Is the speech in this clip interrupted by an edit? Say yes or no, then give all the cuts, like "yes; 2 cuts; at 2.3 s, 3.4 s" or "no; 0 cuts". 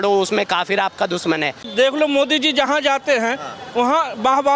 yes; 1 cut; at 1.7 s